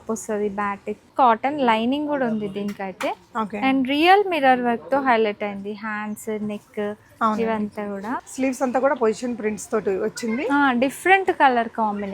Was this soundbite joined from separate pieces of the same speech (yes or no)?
yes